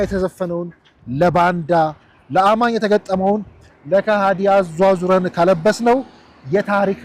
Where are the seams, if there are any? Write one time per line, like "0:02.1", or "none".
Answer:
none